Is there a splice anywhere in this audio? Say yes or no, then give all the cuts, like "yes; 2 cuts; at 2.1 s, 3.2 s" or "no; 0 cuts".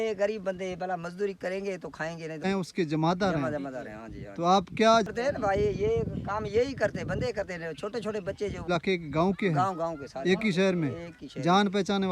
yes; 3 cuts; at 2.5 s, 5.1 s, 8.7 s